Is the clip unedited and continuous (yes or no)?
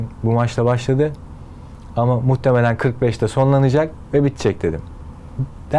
yes